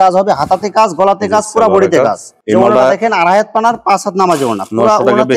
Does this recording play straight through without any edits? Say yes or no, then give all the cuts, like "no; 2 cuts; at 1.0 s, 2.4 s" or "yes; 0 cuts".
yes; 0 cuts